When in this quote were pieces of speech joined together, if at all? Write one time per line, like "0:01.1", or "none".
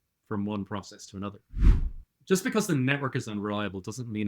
0:01.9